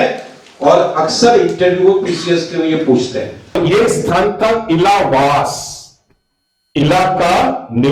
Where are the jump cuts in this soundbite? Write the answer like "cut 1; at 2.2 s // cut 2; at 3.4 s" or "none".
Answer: cut 1; at 3.5 s